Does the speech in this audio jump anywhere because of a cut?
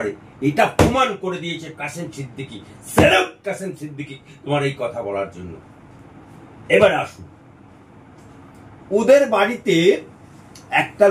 no; 0 cuts

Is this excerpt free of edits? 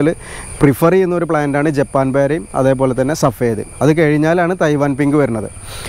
yes; 0 cuts

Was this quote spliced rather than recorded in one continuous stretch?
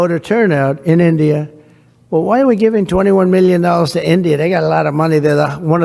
no; 0 cuts

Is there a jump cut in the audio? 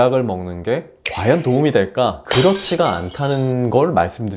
yes; 1 cut; at 2.2 s

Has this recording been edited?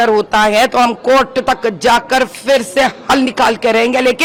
no; 0 cuts

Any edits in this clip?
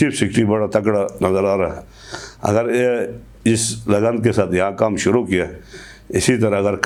no; 0 cuts

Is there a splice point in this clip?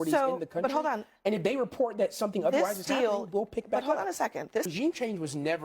yes; 1 cut; at 4.7 s

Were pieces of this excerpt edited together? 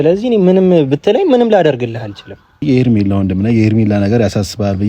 yes; 1 cut; at 2.6 s

